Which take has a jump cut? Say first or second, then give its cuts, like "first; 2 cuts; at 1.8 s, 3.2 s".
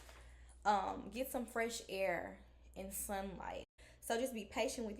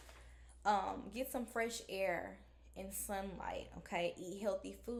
first; 1 cut; at 3.8 s